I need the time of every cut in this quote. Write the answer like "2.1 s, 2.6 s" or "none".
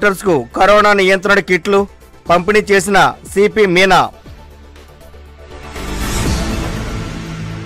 none